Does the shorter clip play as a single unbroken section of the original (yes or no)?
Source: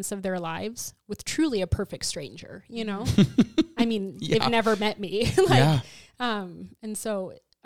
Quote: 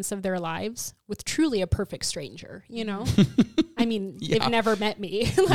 yes